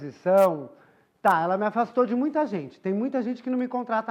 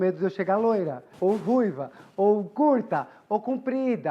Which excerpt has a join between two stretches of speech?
second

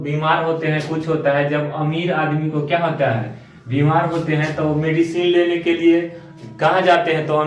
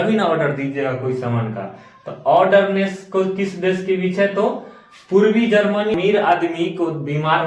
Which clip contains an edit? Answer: second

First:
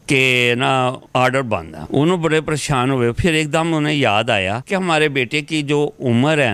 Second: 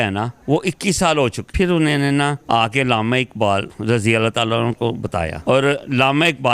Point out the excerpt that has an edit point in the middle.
second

